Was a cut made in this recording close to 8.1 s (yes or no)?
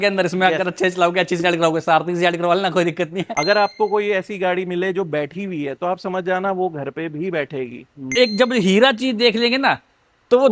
yes